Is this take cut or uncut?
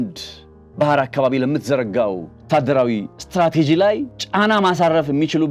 cut